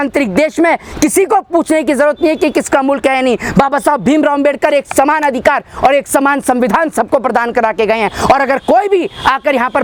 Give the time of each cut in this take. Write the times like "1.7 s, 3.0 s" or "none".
none